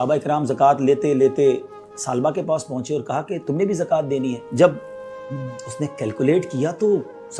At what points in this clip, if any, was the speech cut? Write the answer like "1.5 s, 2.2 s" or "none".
none